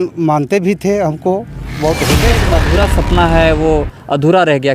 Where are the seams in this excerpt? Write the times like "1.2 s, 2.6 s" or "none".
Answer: 2.5 s